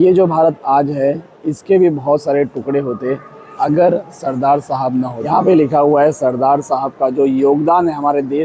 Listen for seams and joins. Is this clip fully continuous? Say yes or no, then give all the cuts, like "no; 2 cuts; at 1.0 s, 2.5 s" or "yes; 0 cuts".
no; 1 cut; at 5.4 s